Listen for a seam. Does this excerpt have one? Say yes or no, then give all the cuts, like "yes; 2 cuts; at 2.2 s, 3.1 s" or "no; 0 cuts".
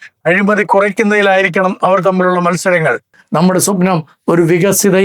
yes; 1 cut; at 3.1 s